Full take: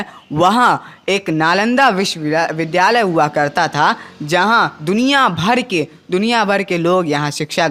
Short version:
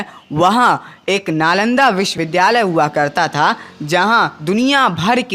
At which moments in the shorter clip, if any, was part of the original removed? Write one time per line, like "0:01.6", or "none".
0:02.2